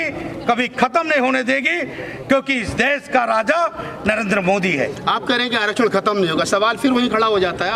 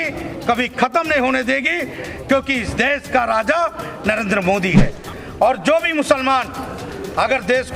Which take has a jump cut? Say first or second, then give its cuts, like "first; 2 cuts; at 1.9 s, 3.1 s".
second; 1 cut; at 5.0 s